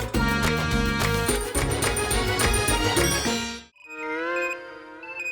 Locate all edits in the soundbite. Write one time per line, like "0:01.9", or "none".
0:01.6
0:03.4